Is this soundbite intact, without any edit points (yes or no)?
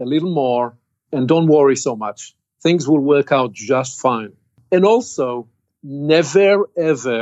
no